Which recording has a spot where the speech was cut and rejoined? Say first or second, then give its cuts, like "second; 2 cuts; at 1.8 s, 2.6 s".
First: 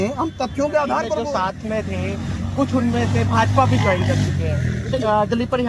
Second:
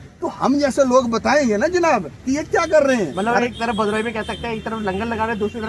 first; 1 cut; at 1.1 s